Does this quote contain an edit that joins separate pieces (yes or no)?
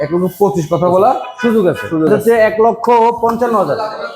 yes